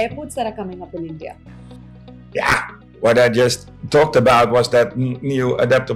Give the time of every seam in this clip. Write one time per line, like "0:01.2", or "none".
none